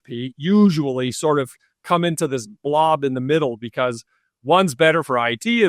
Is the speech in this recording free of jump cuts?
yes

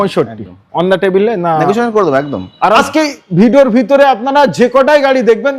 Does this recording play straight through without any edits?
no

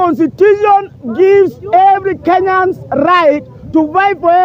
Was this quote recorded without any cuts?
yes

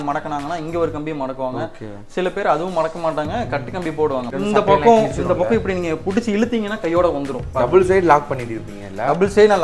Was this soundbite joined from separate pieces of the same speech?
yes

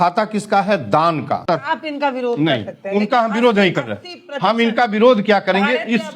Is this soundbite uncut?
no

